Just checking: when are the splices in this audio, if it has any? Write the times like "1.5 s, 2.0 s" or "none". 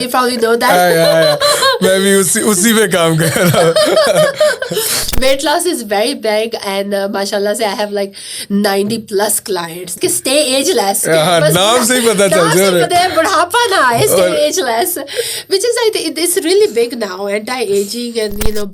9.9 s

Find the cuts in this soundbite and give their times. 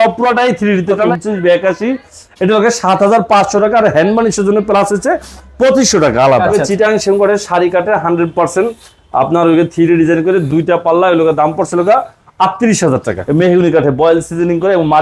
1.1 s, 6.6 s, 13.2 s

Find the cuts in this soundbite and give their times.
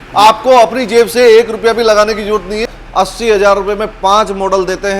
2.7 s

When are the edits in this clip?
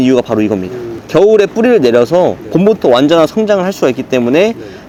none

